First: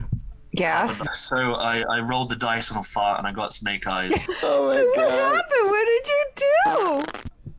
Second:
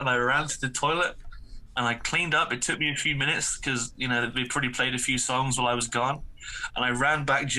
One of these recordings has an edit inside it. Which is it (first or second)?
first